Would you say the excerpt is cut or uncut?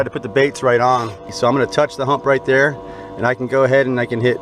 cut